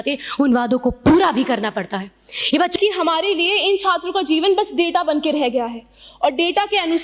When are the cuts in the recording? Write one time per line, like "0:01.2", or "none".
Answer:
0:02.7